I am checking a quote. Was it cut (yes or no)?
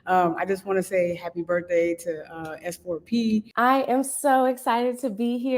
yes